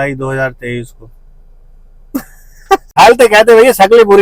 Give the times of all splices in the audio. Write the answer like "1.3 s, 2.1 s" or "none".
2.9 s